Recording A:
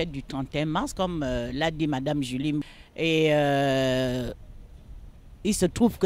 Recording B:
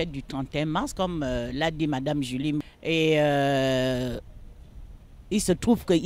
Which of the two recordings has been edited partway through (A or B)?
B